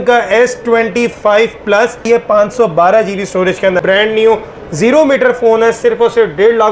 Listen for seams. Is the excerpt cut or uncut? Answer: cut